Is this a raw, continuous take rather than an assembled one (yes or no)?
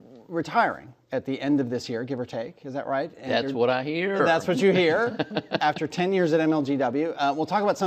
no